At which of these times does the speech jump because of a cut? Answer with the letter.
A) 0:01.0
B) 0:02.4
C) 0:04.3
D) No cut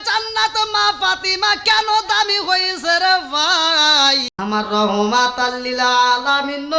C